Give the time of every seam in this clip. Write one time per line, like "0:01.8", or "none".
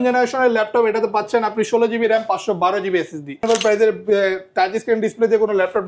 0:03.4